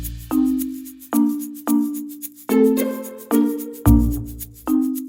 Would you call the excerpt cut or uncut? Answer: uncut